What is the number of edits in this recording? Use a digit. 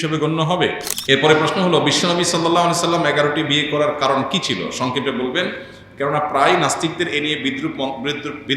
1